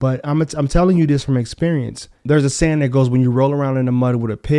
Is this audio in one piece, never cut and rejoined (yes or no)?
no